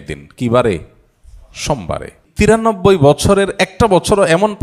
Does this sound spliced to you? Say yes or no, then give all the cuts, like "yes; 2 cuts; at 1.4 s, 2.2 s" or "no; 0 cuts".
yes; 1 cut; at 2.3 s